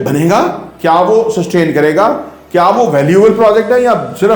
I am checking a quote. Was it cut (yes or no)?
no